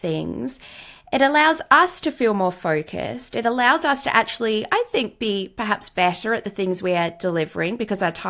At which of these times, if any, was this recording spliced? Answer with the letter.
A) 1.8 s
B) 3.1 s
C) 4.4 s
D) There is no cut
D